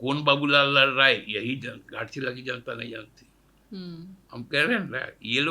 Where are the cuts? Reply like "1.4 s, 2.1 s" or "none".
4.2 s